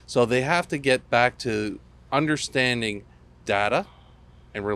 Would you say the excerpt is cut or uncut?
uncut